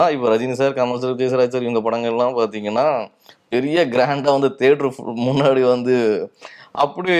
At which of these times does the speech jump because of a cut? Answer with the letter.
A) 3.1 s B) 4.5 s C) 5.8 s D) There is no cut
D